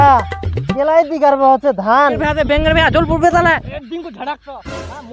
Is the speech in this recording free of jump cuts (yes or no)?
no